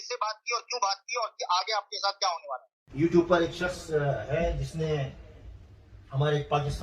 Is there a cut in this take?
yes; 1 cut; at 2.8 s

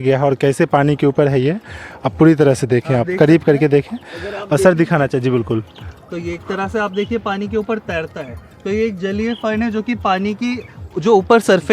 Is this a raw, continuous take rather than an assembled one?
yes; 0 cuts

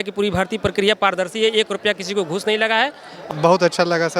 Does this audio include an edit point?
yes; 1 cut; at 3.3 s

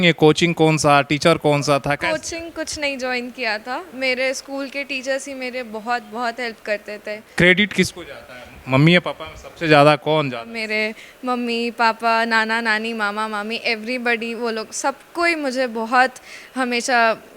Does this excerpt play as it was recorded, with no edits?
no; 3 cuts; at 2.0 s, 7.3 s, 10.6 s

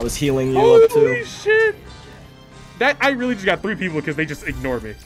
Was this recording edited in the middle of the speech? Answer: no; 0 cuts

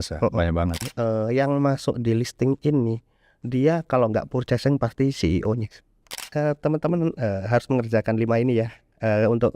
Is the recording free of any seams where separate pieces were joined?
no; 2 cuts; at 0.9 s, 6.3 s

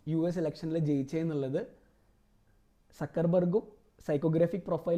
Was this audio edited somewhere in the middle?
no; 0 cuts

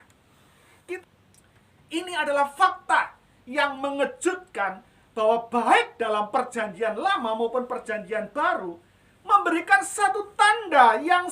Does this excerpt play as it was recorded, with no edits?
no; 1 cut; at 1.0 s

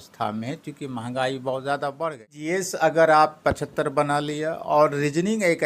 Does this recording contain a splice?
yes; 1 cut; at 2.4 s

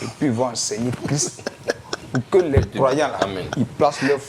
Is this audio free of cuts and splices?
yes; 0 cuts

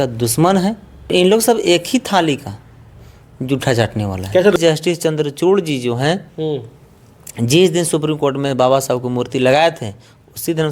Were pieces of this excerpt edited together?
yes; 2 cuts; at 1.1 s, 4.6 s

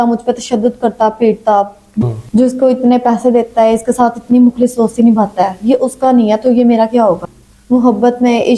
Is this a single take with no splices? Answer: no; 2 cuts; at 2.0 s, 7.2 s

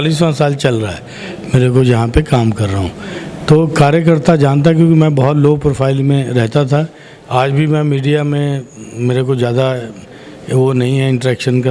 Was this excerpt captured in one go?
yes; 0 cuts

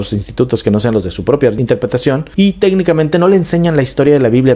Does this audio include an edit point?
yes; 1 cut; at 2.0 s

